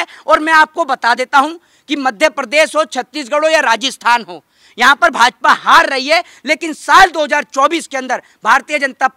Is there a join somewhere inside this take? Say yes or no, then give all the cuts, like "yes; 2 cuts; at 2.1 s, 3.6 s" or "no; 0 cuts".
no; 0 cuts